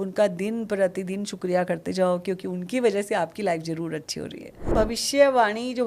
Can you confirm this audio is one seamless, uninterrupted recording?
no; 1 cut; at 4.6 s

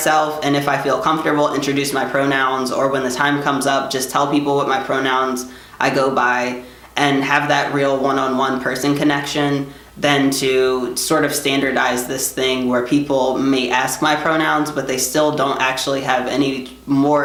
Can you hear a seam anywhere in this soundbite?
no; 0 cuts

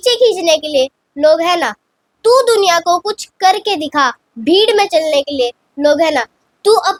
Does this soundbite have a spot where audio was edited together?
no; 0 cuts

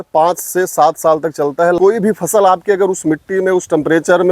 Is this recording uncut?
no; 1 cut; at 1.8 s

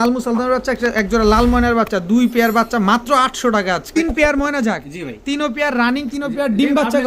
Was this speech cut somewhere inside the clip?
yes; 1 cut; at 4.0 s

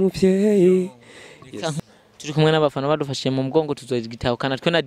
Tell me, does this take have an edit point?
yes; 1 cut; at 1.8 s

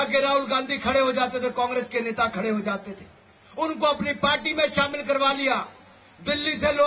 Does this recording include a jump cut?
no; 0 cuts

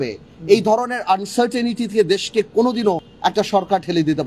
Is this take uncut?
no; 1 cut; at 3.1 s

